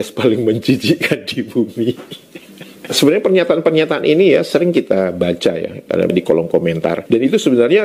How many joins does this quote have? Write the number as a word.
zero